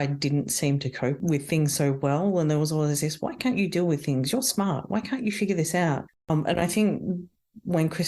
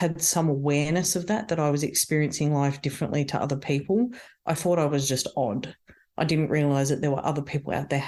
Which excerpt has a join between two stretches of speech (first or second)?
first